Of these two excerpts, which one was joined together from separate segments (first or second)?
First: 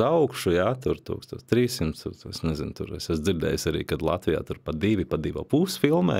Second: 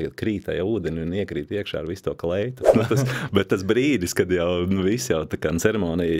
second